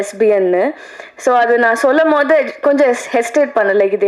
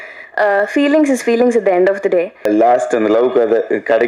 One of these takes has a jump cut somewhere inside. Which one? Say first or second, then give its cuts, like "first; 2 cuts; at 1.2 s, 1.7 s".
second; 1 cut; at 2.5 s